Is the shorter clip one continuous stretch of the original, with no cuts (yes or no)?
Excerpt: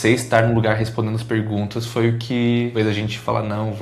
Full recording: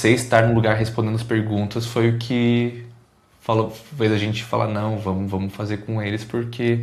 no